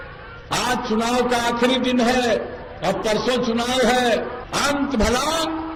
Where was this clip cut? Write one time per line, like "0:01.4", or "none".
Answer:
none